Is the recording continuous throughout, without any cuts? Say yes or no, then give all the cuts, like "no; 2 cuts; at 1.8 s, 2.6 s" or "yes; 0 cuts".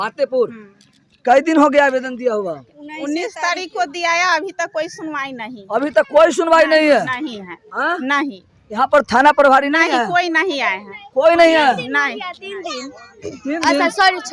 yes; 0 cuts